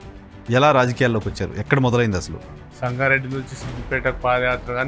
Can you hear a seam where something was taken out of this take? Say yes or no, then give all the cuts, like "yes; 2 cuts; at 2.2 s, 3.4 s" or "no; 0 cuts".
yes; 1 cut; at 2.6 s